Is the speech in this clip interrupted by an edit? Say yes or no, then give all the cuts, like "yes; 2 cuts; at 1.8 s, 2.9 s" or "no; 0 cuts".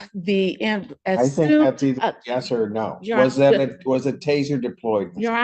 no; 0 cuts